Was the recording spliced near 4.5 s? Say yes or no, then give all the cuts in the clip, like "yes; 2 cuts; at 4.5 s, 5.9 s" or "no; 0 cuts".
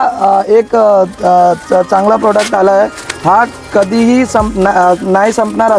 no; 0 cuts